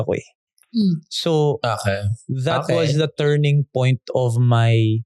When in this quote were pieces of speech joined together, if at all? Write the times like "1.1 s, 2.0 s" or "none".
none